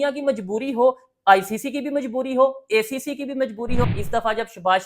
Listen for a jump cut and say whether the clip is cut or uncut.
cut